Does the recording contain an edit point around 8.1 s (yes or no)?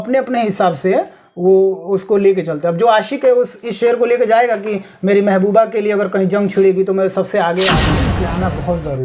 yes